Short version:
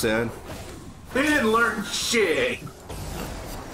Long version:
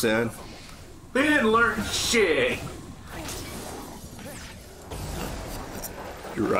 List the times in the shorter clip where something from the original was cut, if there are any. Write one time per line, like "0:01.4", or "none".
0:02.7